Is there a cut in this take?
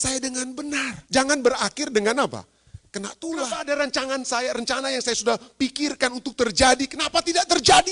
yes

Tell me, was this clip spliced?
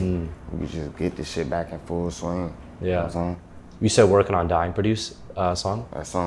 no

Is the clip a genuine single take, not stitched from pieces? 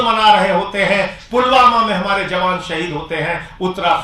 yes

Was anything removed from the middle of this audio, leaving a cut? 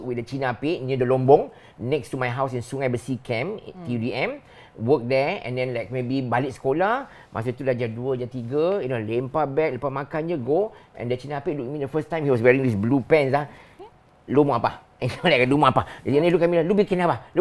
no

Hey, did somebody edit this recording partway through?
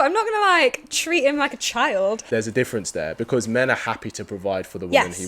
yes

